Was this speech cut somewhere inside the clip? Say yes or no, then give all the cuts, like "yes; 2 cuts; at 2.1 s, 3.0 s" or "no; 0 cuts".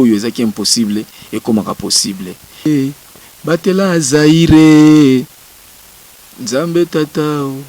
yes; 1 cut; at 2.7 s